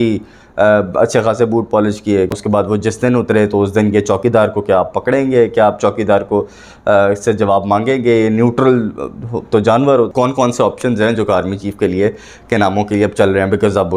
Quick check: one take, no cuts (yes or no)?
no